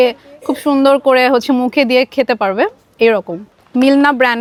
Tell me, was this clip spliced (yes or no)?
no